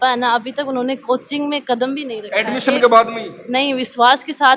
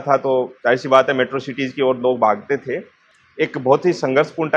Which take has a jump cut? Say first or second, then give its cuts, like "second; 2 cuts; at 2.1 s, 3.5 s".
second; 1 cut; at 3.1 s